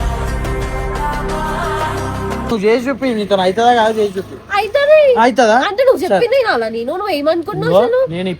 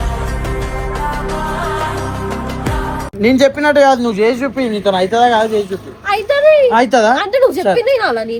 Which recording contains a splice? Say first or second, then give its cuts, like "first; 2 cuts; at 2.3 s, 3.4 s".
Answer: first; 1 cut; at 2.5 s